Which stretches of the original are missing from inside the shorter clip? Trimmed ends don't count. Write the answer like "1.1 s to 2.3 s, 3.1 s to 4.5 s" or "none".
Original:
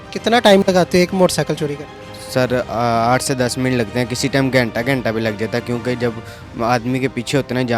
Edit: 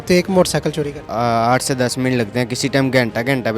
1.9 s to 2.7 s